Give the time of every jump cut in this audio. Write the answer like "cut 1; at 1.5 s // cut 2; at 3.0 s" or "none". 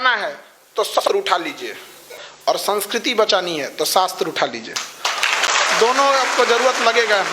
cut 1; at 1.0 s